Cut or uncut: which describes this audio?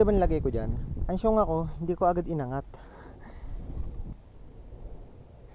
cut